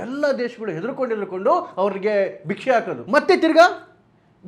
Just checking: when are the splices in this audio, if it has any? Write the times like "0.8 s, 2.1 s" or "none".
3.0 s

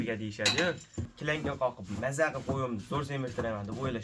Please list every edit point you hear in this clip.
1.1 s

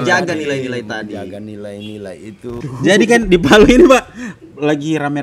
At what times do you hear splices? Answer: 2.6 s

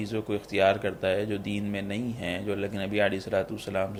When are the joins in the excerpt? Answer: none

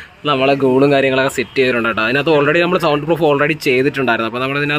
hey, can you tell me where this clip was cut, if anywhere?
none

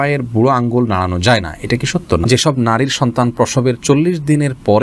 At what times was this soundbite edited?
2.3 s

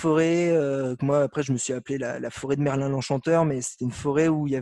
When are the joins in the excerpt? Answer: none

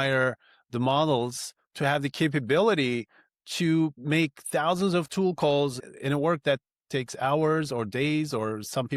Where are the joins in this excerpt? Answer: 4.0 s, 5.8 s

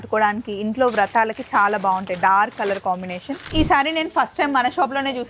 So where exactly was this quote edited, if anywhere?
3.5 s

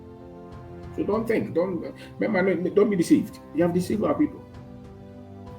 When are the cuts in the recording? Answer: 4.4 s

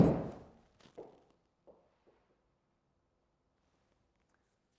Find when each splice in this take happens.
none

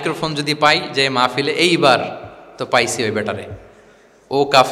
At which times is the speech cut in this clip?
none

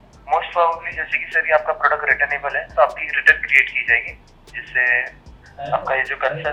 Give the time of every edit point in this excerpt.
none

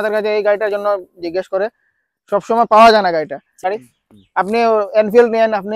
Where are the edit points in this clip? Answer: 3.6 s

